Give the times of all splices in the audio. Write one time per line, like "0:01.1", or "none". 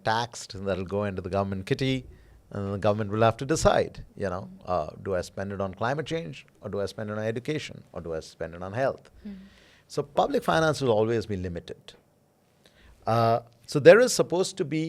none